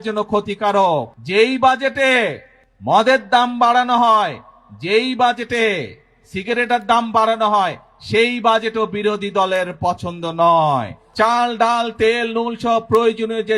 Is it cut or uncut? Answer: cut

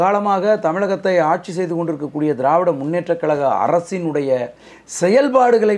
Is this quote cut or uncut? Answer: uncut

